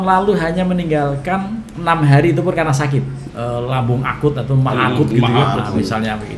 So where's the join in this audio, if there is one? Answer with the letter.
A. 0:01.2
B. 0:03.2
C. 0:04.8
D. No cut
B